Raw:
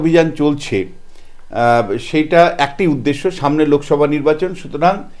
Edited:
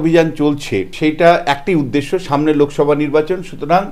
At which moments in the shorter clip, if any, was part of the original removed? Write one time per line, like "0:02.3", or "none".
0:00.9